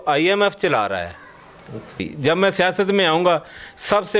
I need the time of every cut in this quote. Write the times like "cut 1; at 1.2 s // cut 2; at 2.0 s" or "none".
cut 1; at 2.1 s